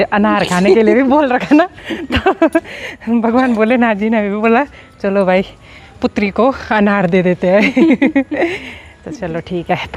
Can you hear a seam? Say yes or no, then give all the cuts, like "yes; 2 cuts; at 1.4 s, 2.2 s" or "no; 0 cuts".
no; 0 cuts